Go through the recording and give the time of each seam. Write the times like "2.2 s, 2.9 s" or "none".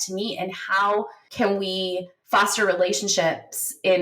1.2 s, 2.1 s

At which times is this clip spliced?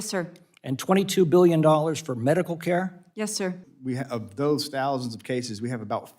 3.7 s

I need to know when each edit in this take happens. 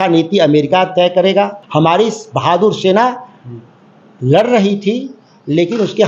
1.6 s

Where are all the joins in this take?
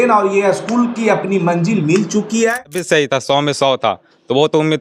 2.8 s

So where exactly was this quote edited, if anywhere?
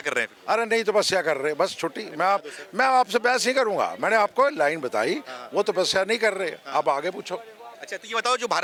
none

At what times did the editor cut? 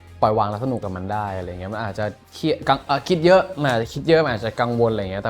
none

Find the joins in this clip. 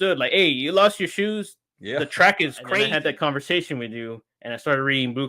2.8 s

